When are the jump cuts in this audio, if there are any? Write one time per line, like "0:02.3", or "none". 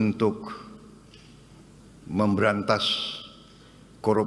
none